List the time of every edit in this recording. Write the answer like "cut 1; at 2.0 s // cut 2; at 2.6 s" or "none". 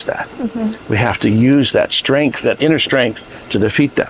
none